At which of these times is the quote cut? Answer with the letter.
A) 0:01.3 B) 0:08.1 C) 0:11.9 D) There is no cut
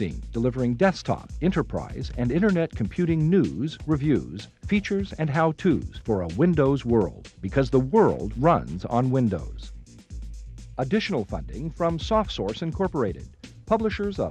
D